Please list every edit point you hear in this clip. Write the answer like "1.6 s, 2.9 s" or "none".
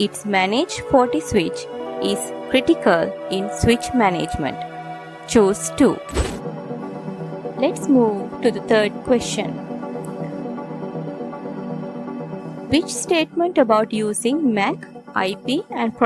6.3 s